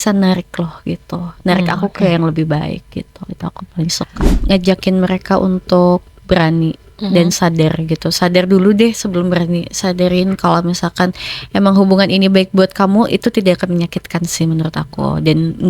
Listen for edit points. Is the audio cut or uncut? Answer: cut